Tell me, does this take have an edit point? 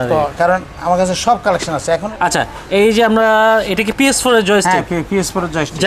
yes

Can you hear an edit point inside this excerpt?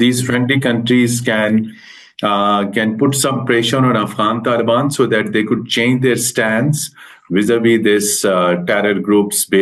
no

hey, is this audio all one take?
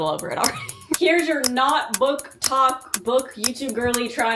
no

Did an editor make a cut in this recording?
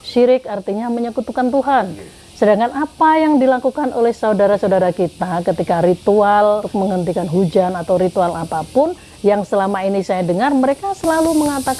yes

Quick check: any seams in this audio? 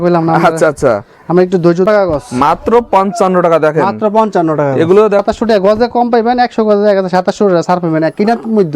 yes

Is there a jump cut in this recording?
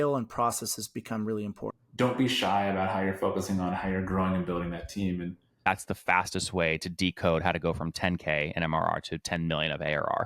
yes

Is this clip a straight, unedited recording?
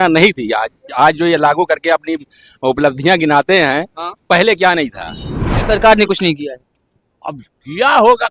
no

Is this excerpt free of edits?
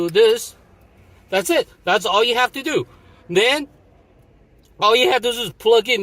yes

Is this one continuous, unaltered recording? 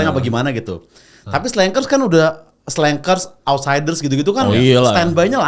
yes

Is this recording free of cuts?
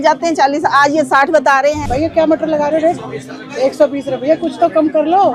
no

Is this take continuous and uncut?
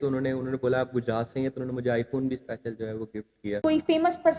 no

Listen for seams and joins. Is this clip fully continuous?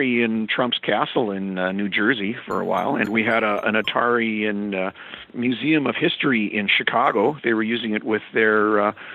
no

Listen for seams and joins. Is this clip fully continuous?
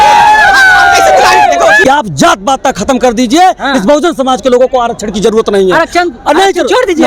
no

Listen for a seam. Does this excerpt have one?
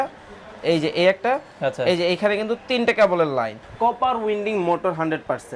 yes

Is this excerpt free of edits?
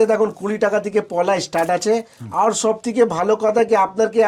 yes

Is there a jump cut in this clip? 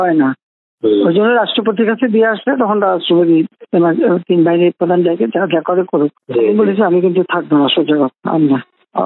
yes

